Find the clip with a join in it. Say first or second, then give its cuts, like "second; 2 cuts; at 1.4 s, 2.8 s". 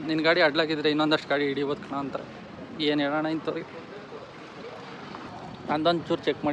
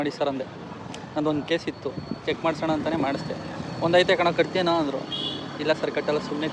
first; 1 cut; at 5.3 s